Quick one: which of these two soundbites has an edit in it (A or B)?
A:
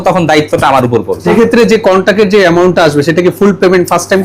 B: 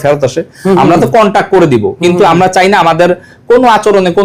A